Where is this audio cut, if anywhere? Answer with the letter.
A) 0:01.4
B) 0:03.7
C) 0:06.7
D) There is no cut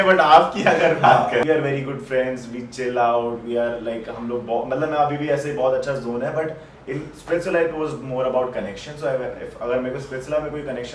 A